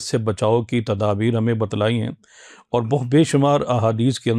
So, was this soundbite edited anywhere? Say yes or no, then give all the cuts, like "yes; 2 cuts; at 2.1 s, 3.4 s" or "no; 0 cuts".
no; 0 cuts